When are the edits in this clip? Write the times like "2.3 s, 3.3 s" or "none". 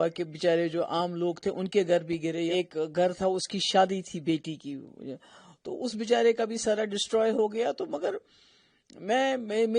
2.5 s